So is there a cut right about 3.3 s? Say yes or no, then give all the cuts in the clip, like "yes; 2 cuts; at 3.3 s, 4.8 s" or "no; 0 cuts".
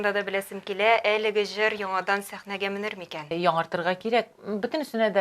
yes; 1 cut; at 3.3 s